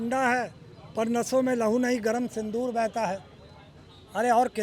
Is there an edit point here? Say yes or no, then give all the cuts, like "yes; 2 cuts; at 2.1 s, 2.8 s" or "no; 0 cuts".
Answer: no; 0 cuts